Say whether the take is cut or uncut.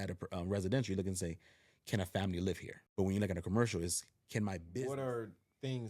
cut